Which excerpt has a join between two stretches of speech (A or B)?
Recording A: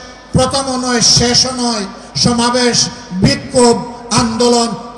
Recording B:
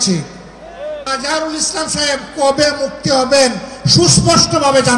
B